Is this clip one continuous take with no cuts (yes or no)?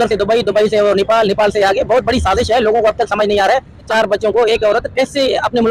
no